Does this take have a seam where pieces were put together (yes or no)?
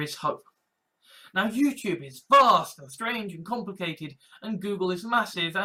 no